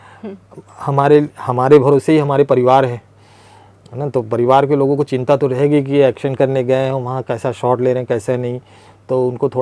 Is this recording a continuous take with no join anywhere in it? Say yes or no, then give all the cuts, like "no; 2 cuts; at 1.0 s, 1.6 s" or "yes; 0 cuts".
yes; 0 cuts